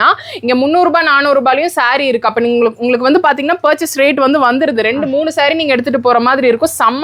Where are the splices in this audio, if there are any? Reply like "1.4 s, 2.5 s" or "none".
none